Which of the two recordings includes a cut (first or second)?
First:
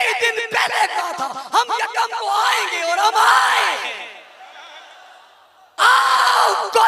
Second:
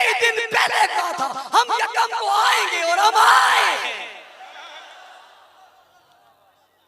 first